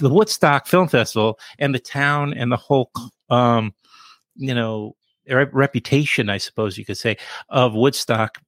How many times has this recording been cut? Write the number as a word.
zero